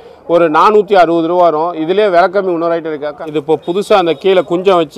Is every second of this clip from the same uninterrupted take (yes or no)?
no